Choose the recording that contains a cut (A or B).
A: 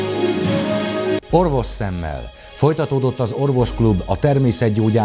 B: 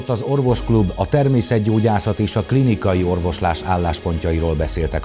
A